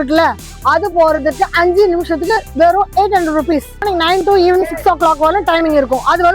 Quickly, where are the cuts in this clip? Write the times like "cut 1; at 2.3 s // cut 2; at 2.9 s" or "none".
cut 1; at 3.9 s